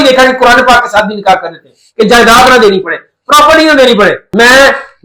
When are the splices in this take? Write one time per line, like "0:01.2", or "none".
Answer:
none

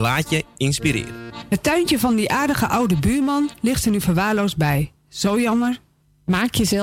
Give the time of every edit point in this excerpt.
0:01.4

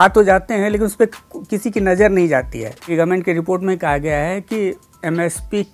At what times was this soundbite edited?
0:02.9

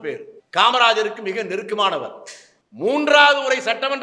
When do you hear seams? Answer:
0:02.5

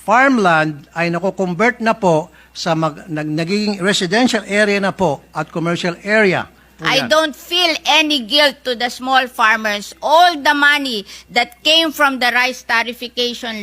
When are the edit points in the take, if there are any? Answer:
0:06.7

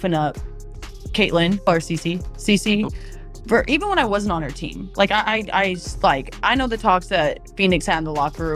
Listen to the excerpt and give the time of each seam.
0:01.7

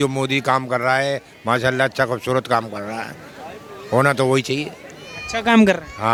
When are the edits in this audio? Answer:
none

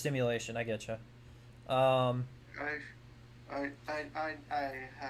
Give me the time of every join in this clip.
none

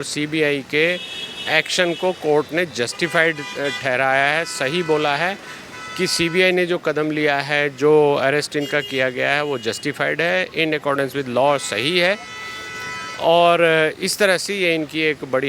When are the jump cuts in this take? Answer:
none

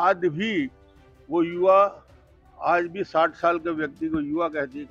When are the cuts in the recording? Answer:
none

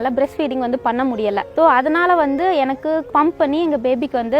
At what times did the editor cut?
0:01.5
0:03.1

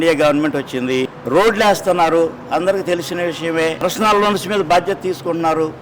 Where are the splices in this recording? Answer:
0:01.2
0:03.8

